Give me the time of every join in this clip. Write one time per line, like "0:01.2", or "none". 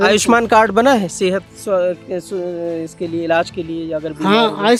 none